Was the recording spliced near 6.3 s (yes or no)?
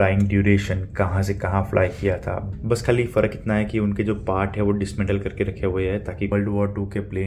yes